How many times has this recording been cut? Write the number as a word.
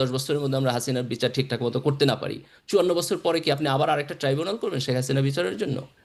zero